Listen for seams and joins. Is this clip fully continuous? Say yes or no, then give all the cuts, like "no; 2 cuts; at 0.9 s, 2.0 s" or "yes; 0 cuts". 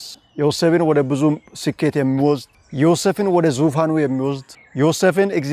yes; 0 cuts